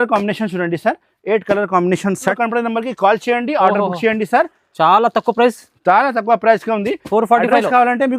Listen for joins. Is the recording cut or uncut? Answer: cut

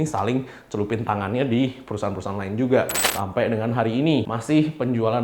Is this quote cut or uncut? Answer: cut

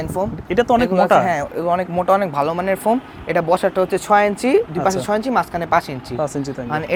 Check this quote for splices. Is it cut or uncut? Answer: uncut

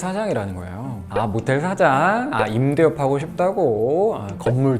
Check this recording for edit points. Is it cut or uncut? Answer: cut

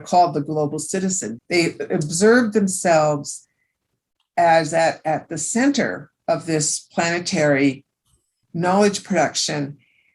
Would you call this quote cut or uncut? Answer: uncut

